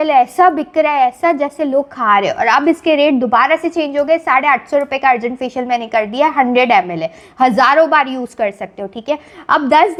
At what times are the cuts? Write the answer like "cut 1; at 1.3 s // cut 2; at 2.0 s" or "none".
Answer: none